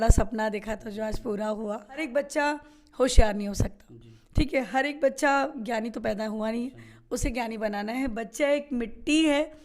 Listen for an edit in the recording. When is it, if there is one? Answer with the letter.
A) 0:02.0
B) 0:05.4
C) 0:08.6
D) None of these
A